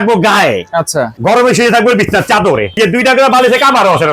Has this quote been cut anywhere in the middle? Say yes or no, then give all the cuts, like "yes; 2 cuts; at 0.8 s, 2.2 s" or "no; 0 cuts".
yes; 2 cuts; at 1.1 s, 2.8 s